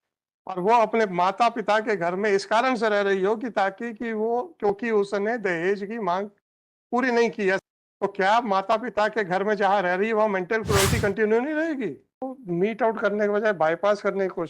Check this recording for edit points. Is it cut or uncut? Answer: cut